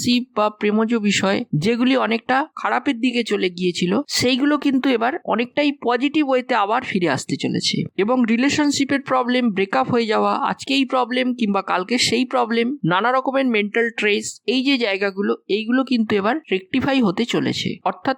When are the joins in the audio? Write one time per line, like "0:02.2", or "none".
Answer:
none

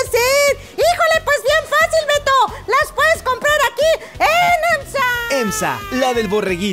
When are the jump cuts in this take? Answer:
0:05.8

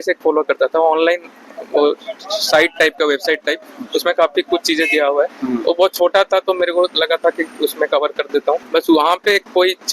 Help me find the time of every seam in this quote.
0:08.6

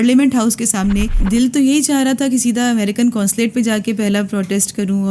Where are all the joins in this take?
0:01.2

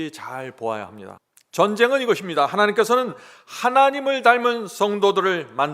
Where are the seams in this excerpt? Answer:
0:01.1

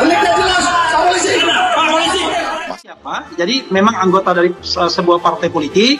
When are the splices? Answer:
0:02.9

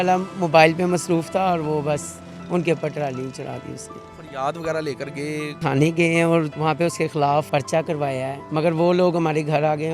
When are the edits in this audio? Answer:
0:04.1
0:05.6
0:06.5
0:07.5
0:08.4

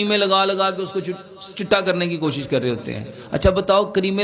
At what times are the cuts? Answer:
none

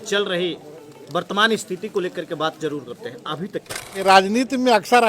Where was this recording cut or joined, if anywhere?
0:04.0

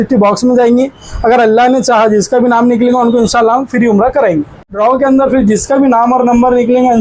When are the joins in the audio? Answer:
0:04.6

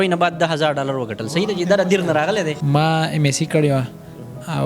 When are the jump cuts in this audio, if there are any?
0:02.6

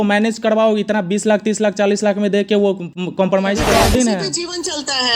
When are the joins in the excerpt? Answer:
0:03.7

